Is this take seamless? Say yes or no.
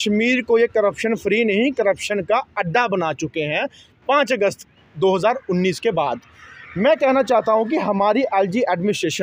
yes